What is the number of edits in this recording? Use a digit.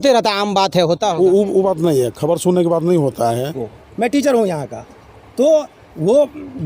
1